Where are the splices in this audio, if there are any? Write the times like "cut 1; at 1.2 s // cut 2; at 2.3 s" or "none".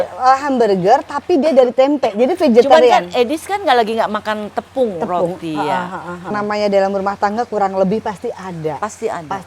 cut 1; at 6.3 s